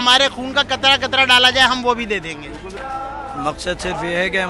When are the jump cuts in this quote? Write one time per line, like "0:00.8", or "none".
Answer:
0:02.8